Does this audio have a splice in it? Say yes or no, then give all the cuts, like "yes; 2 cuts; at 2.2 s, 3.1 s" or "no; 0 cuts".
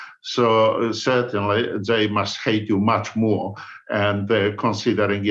no; 0 cuts